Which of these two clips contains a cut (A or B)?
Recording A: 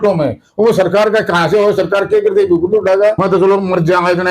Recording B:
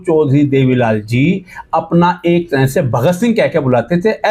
A